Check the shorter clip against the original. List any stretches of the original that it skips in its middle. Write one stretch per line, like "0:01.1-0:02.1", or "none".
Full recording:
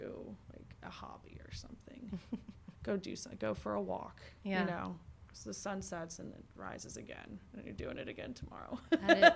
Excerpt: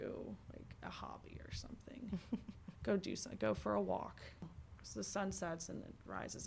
0:04.4-0:04.9